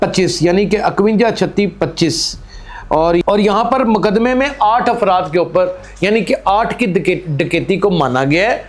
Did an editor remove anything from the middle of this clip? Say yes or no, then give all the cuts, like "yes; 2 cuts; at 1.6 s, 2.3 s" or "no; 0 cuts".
yes; 1 cut; at 3.2 s